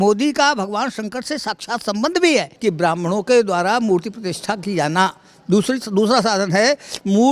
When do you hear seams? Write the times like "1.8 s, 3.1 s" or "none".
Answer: 2.5 s